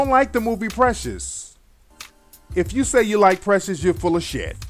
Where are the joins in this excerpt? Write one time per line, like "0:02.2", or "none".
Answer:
0:02.5